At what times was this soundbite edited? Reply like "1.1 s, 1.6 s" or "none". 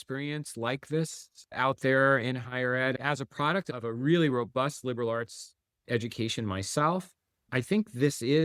3.0 s